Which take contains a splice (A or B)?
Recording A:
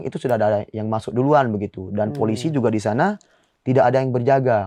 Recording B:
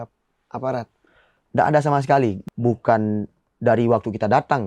B